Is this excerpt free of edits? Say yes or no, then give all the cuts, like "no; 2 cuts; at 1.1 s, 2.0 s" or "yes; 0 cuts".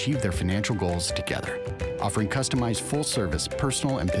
yes; 0 cuts